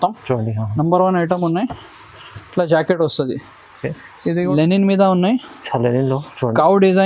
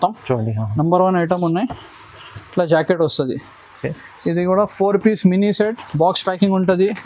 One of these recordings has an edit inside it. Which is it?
first; 1 cut; at 4.5 s

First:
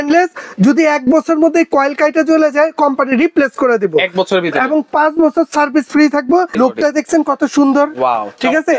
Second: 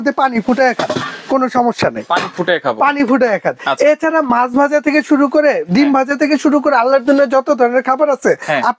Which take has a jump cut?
first; 1 cut; at 6.5 s

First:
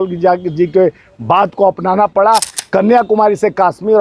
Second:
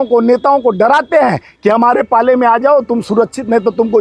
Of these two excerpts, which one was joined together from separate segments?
first; 1 cut; at 2.5 s

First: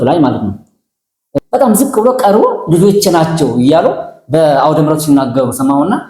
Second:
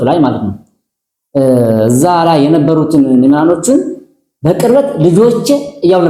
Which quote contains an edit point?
first; 1 cut; at 1.2 s

